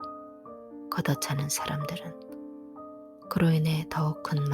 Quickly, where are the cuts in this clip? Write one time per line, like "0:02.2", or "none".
0:00.9